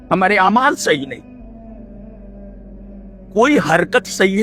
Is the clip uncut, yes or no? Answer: yes